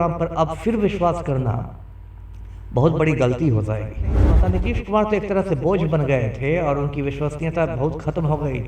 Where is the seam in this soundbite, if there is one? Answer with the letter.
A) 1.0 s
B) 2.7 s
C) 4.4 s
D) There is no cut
C